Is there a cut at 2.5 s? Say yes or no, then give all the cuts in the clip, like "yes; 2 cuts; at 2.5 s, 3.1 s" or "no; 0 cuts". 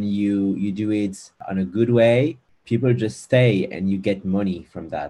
yes; 2 cuts; at 1.4 s, 2.5 s